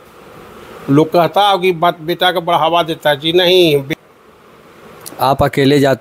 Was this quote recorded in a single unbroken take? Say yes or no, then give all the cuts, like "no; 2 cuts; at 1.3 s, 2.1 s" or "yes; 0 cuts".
no; 1 cut; at 3.9 s